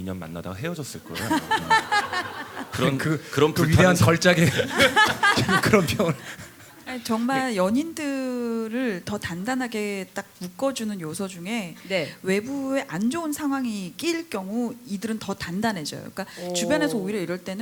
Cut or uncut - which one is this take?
uncut